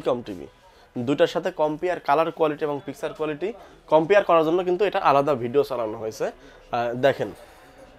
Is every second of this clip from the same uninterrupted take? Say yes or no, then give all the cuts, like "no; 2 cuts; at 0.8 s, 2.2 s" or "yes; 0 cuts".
yes; 0 cuts